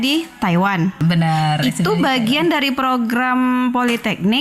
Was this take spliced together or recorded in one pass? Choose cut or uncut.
cut